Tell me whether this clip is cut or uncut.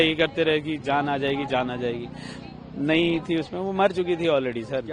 uncut